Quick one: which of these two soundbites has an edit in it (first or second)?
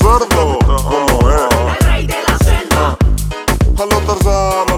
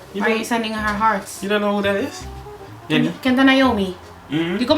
second